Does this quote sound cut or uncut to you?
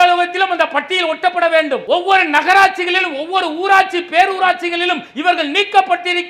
cut